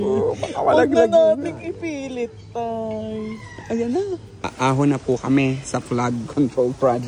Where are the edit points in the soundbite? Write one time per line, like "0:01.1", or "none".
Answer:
0:04.5